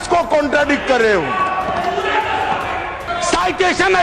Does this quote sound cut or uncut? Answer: cut